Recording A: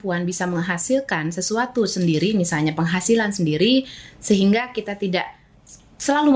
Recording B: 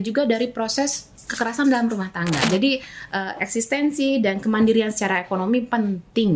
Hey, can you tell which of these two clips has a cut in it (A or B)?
B